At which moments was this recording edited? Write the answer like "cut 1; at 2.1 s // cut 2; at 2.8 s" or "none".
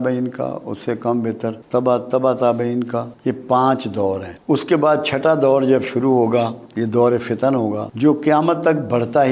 cut 1; at 6.7 s